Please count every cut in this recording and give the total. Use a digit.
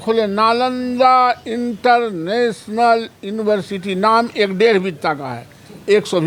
0